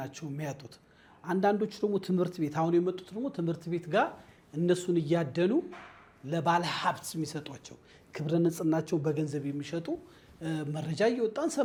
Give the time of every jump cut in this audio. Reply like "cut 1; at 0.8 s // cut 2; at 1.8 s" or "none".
none